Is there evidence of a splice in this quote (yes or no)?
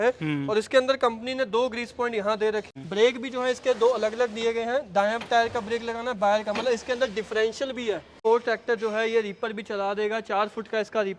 yes